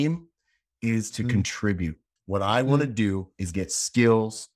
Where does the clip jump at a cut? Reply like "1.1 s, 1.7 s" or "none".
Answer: 2.1 s